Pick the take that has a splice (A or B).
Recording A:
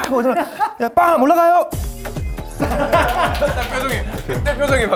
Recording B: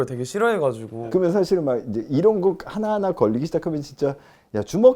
B